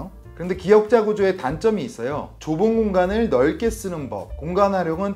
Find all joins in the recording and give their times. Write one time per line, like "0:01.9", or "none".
0:02.3